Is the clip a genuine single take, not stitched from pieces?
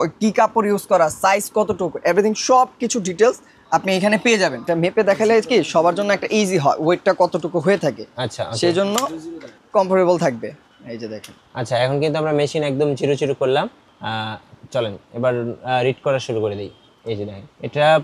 no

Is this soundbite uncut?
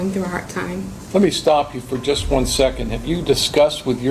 no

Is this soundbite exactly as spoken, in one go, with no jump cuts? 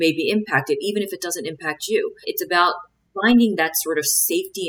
no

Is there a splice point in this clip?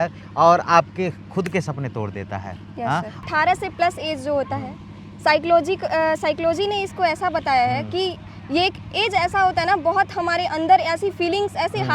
yes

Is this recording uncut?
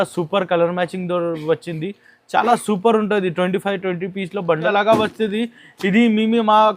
no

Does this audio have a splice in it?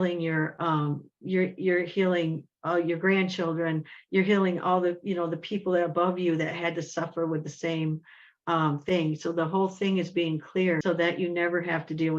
yes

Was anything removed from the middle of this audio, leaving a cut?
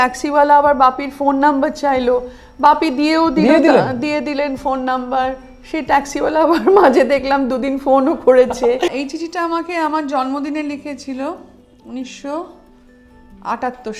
yes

